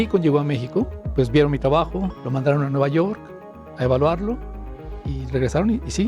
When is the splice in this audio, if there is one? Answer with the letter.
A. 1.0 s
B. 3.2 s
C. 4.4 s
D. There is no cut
A